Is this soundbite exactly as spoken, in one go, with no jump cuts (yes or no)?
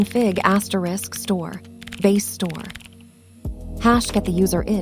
no